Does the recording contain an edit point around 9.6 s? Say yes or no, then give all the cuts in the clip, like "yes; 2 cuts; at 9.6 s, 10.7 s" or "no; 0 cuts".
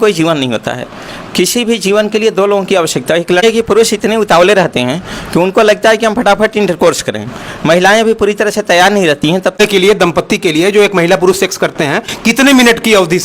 yes; 2 cuts; at 3.4 s, 9.6 s